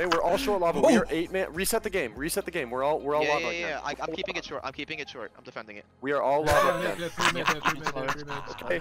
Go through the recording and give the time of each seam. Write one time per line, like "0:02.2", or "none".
none